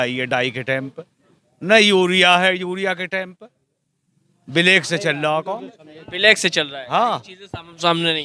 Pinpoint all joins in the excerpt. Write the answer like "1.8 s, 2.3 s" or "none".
none